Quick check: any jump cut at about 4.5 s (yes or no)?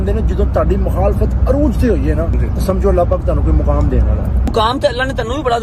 yes